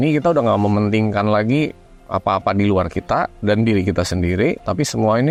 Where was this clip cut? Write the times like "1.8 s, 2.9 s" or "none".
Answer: none